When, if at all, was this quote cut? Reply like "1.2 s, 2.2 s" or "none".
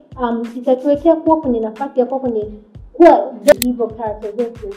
3.5 s